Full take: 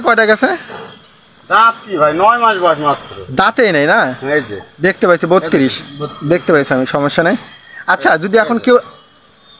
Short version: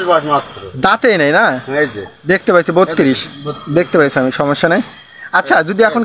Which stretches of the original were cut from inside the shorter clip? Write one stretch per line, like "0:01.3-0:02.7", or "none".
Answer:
none